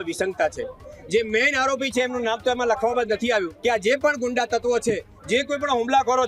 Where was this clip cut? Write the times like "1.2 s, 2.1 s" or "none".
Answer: 3.5 s